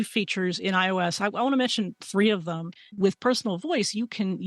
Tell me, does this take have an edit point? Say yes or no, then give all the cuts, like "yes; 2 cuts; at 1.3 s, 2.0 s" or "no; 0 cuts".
yes; 1 cut; at 2.9 s